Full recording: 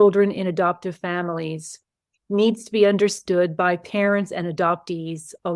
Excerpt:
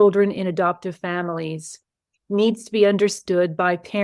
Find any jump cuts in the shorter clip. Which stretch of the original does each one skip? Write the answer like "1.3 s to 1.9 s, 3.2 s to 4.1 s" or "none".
none